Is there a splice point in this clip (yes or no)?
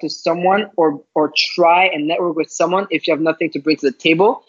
no